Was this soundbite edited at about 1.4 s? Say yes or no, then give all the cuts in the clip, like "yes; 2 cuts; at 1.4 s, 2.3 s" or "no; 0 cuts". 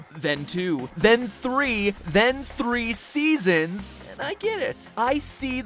no; 1 cut; at 3.4 s